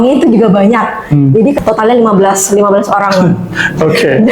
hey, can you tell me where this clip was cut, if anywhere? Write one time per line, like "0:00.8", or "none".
0:01.6